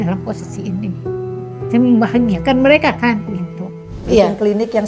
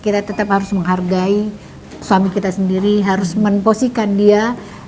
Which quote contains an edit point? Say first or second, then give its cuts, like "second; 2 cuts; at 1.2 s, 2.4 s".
first; 1 cut; at 3.9 s